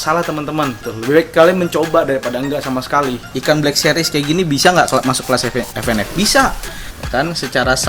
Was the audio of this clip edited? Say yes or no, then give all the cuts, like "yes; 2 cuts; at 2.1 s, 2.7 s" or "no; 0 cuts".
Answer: yes; 2 cuts; at 3.3 s, 6.6 s